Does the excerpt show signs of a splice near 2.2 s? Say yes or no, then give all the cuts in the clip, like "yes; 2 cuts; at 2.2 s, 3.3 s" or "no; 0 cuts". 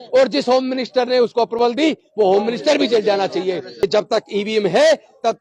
no; 1 cut; at 3.8 s